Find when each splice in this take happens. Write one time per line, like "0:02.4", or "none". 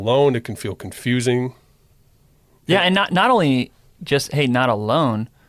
none